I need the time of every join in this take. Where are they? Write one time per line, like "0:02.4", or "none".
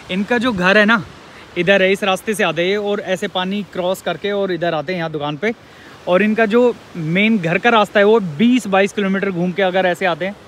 none